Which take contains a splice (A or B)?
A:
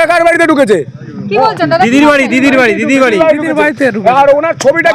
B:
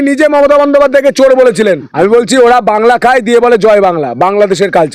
B